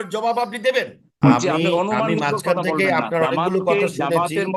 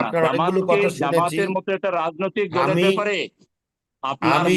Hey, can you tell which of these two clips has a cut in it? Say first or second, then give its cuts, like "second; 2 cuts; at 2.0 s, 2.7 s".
first; 1 cut; at 1.1 s